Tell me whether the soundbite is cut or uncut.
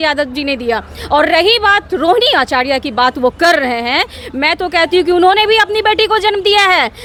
uncut